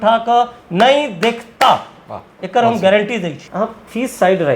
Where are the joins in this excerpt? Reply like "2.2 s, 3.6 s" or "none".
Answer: 3.4 s